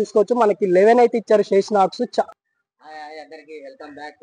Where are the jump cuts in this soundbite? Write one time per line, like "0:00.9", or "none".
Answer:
0:02.3